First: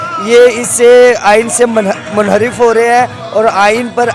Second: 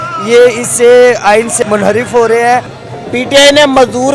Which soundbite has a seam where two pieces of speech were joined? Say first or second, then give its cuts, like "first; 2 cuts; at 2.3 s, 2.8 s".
second; 2 cuts; at 1.5 s, 2.7 s